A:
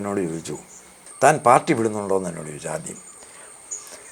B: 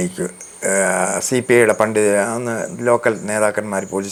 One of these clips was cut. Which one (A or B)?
A